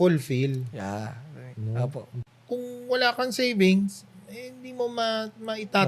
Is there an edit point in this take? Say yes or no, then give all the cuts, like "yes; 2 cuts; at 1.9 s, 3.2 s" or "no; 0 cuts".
yes; 1 cut; at 2.1 s